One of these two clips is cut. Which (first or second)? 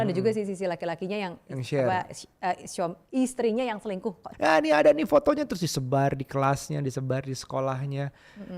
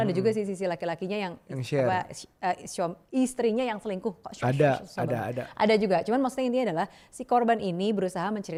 first